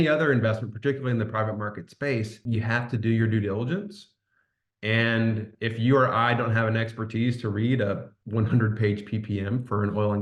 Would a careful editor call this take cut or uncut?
cut